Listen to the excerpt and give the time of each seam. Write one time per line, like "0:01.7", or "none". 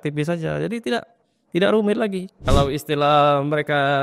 0:02.4